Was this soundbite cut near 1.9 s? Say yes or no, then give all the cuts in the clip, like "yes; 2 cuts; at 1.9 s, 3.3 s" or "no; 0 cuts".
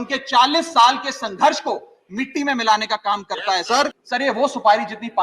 no; 1 cut; at 4.0 s